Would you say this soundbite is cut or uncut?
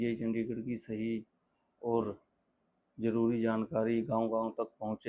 uncut